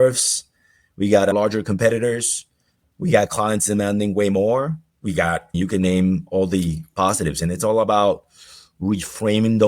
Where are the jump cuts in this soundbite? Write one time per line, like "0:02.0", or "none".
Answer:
0:01.3
0:05.0